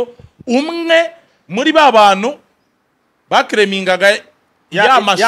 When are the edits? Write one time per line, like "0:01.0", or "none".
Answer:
none

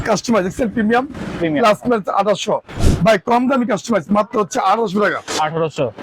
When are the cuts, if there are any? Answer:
0:02.8

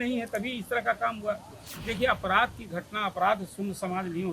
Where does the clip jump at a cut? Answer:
0:01.7

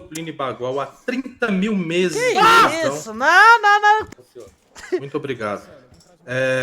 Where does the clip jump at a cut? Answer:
0:04.1

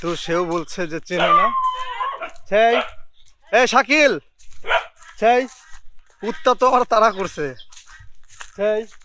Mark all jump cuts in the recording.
0:07.9

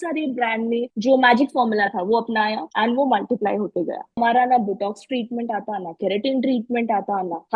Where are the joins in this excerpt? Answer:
0:00.9
0:02.6
0:04.2

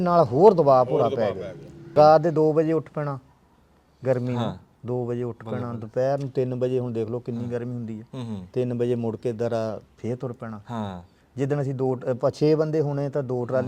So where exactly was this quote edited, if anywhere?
0:01.8

